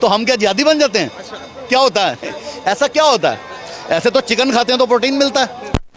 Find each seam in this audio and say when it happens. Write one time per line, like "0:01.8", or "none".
none